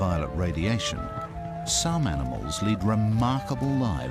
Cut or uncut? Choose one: cut